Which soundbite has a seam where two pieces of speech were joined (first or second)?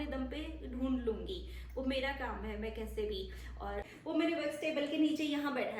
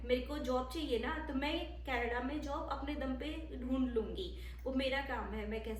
first